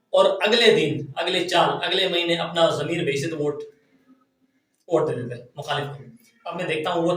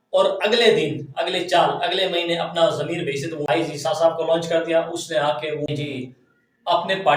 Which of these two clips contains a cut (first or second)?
second